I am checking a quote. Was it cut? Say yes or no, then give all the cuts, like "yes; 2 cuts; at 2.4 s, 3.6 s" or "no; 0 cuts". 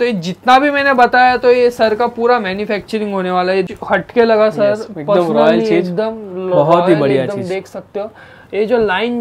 yes; 1 cut; at 3.7 s